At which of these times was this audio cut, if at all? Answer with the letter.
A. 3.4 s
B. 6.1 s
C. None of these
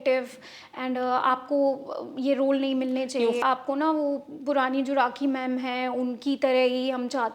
A